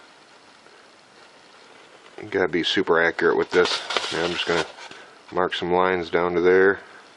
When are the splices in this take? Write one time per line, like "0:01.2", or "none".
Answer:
none